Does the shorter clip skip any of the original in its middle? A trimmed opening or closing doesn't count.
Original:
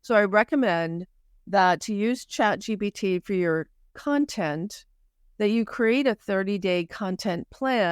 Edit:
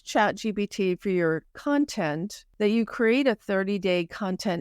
yes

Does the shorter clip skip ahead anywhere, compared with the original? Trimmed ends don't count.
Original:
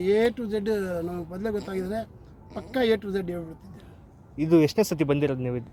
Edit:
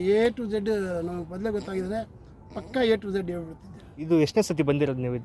yes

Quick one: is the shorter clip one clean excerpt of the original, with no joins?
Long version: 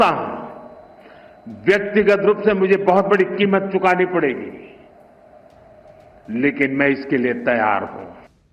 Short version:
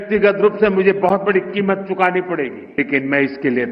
no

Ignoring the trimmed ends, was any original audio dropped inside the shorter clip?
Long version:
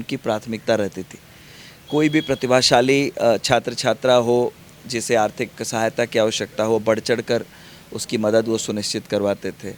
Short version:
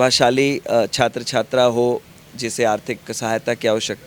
no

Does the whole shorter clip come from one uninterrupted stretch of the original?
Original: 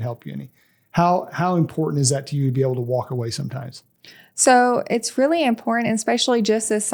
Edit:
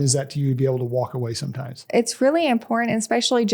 no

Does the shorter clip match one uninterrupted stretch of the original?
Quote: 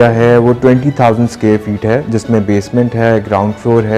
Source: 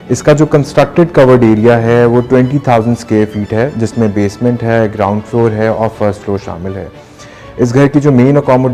yes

